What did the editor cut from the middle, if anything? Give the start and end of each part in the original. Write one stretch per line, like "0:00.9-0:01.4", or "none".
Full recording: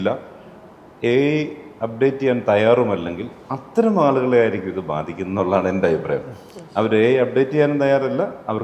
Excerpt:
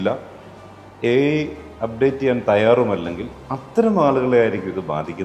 none